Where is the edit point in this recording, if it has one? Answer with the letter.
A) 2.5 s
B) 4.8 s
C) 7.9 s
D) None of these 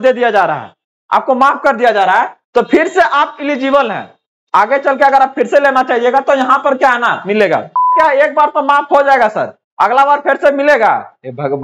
C